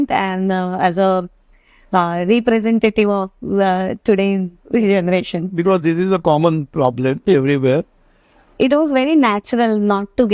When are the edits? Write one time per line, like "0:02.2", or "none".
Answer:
0:08.4